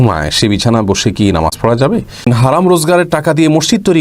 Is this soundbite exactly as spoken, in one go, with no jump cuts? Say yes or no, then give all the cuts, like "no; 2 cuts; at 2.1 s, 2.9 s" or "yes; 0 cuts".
no; 1 cut; at 2.3 s